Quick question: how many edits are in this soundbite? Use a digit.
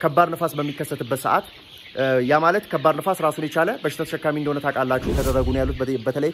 1